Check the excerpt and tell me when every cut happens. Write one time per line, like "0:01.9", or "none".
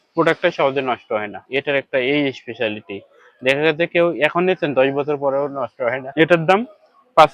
none